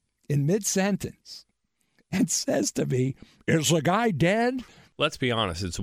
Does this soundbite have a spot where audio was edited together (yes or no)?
yes